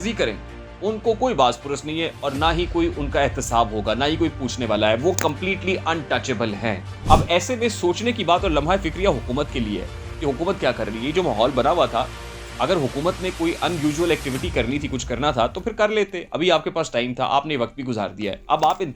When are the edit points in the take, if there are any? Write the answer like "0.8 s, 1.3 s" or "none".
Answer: 6.9 s